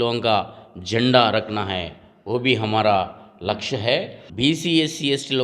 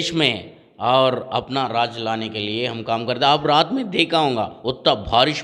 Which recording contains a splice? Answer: first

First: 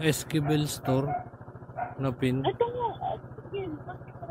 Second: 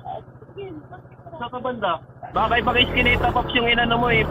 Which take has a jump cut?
second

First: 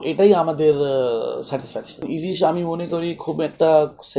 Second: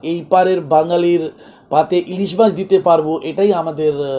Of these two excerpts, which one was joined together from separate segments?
first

